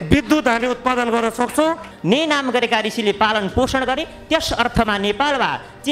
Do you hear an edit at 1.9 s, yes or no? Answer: yes